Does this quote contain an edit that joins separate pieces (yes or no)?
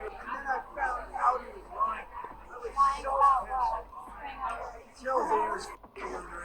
no